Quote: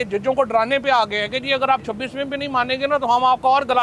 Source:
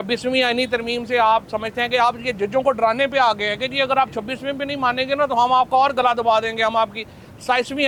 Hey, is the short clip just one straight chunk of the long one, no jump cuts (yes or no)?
yes